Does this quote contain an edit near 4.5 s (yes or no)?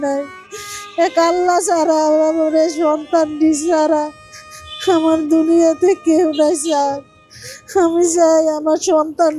no